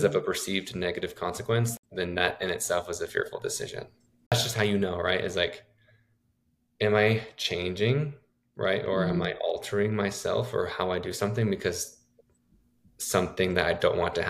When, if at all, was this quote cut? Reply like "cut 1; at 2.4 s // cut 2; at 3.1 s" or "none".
cut 1; at 1.7 s // cut 2; at 4.3 s